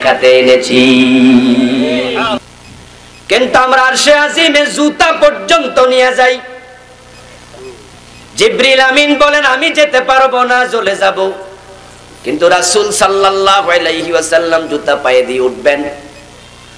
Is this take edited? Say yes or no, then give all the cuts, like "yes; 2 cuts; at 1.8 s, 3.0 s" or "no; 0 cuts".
yes; 1 cut; at 2.5 s